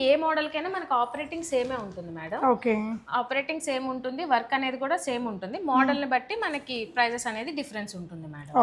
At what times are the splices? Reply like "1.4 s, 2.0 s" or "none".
none